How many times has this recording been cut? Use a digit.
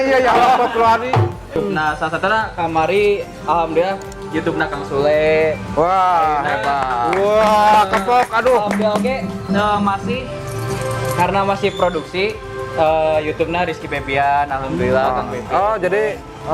1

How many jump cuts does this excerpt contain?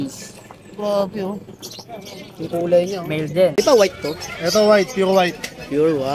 1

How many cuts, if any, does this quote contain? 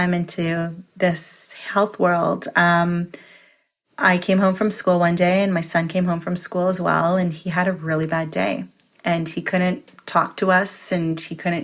0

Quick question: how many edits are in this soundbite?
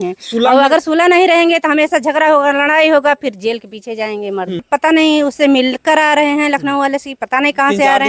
1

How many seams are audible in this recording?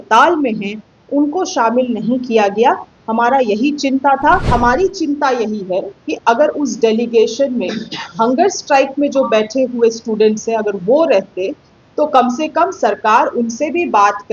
1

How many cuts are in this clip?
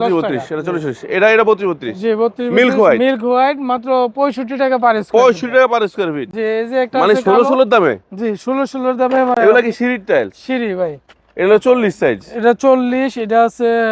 0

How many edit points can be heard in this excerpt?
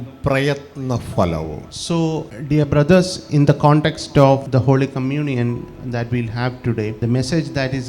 4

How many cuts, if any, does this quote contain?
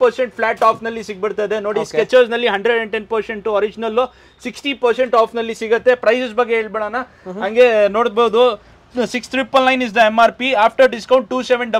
0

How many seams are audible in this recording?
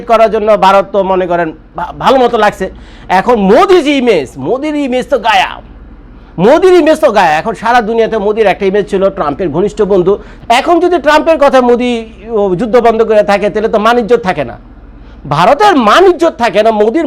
1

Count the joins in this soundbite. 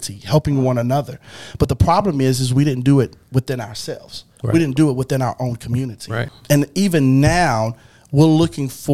1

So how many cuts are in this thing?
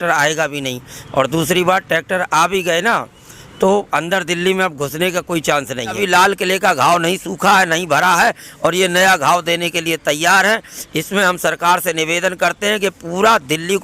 1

